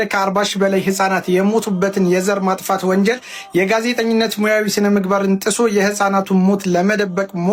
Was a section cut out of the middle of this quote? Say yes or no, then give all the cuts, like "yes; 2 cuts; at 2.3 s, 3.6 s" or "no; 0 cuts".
no; 0 cuts